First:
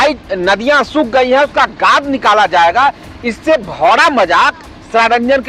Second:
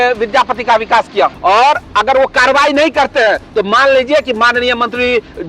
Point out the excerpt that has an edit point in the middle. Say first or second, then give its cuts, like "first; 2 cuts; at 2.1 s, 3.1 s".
second; 1 cut; at 1.4 s